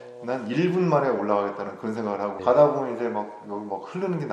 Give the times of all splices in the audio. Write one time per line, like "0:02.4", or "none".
0:02.4